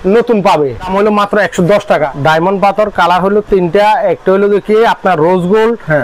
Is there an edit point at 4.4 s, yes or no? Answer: no